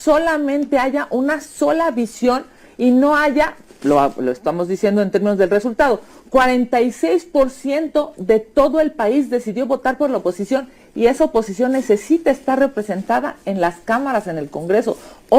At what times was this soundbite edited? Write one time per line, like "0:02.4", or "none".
none